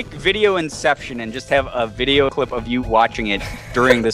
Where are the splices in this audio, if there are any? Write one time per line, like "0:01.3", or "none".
none